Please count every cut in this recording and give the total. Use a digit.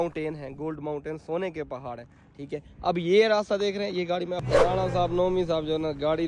1